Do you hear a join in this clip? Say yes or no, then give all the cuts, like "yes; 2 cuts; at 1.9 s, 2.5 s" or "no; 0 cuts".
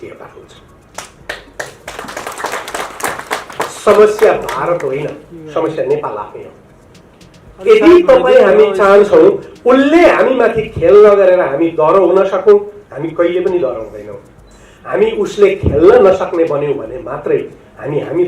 no; 0 cuts